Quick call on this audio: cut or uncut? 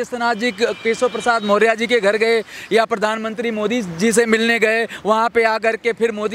uncut